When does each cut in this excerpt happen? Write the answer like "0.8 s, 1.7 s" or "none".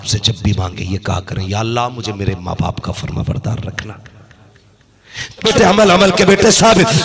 5.5 s